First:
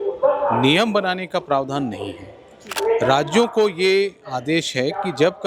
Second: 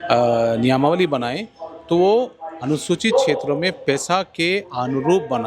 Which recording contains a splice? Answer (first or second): first